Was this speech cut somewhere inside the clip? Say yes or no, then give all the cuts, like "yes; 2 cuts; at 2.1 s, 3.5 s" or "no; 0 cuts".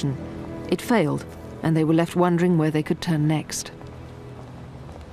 no; 0 cuts